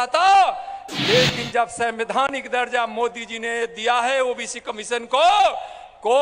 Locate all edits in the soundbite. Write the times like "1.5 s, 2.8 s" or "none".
none